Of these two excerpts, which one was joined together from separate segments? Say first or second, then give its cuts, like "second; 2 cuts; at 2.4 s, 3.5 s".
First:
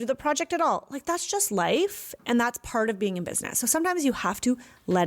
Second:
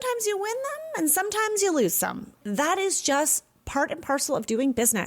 second; 1 cut; at 2.4 s